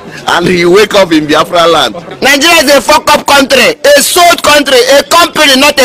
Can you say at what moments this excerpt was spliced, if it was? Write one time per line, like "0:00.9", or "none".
0:02.1